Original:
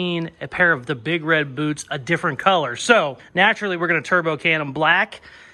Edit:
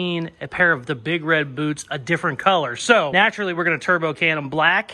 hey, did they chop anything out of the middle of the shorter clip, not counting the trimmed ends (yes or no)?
yes